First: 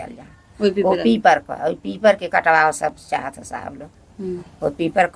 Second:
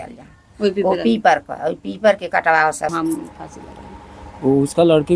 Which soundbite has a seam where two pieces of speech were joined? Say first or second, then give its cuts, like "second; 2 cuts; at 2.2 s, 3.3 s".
second; 1 cut; at 2.9 s